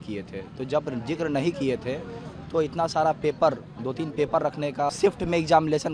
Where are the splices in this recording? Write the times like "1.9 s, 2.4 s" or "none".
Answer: 4.9 s